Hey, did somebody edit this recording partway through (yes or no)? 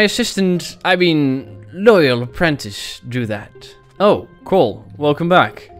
no